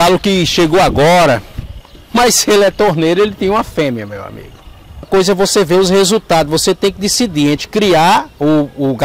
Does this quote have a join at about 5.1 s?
yes; 1 cut; at 5.1 s

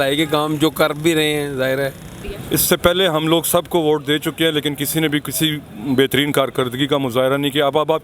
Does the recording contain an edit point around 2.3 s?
yes; 1 cut; at 2.3 s

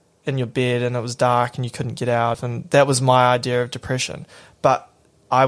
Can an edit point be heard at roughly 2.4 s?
yes; 1 cut; at 2.4 s

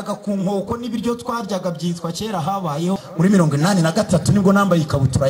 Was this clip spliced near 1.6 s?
no; 1 cut; at 3.1 s

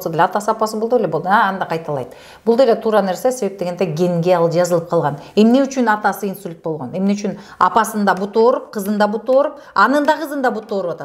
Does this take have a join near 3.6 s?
no; 0 cuts

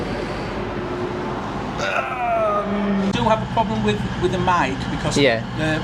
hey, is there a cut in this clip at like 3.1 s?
yes; 1 cut; at 3.1 s

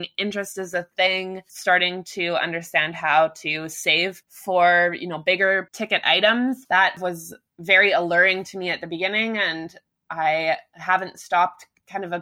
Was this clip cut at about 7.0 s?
yes; 3 cuts; at 4.3 s, 5.7 s, 7.0 s

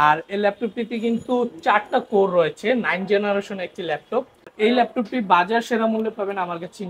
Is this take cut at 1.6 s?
no; 1 cut; at 4.5 s

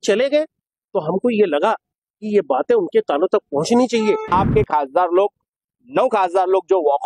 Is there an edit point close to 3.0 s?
no; 1 cut; at 4.3 s

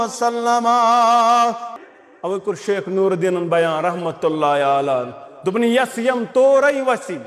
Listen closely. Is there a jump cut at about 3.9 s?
no; 1 cut; at 1.7 s

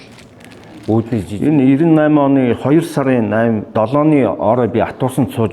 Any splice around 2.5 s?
no; 1 cut; at 1.3 s

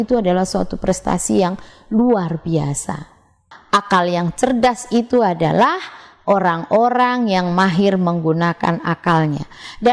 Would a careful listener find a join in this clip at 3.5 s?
yes; 1 cut; at 3.5 s

